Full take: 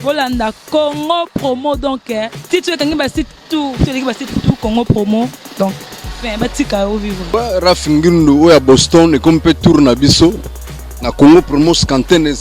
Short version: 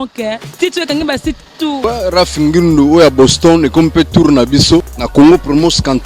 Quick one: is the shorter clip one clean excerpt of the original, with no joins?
no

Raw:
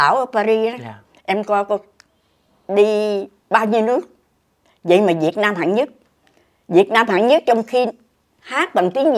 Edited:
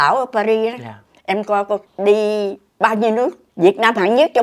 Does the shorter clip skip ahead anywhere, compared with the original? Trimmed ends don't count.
yes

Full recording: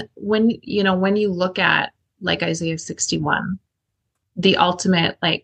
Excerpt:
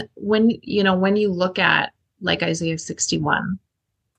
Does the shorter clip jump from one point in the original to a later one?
no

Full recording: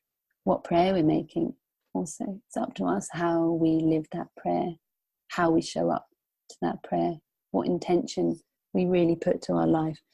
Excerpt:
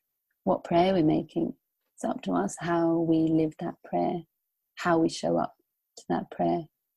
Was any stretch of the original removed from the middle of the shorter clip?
yes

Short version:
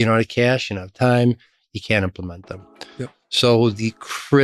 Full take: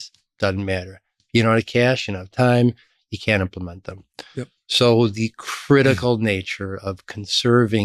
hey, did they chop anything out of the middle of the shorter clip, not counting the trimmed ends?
no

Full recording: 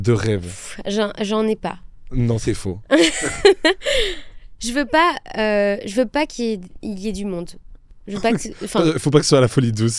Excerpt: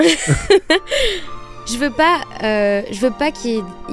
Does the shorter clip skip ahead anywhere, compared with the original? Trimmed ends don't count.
no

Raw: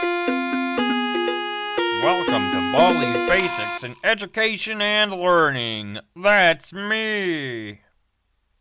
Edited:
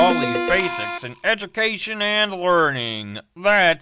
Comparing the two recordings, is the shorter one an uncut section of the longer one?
yes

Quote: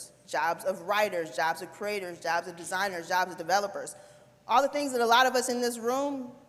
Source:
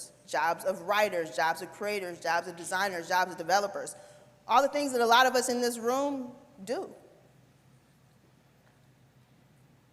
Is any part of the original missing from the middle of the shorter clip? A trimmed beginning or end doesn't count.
no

